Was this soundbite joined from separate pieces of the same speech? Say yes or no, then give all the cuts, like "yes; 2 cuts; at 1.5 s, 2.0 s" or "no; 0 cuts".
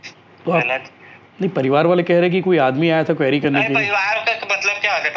no; 0 cuts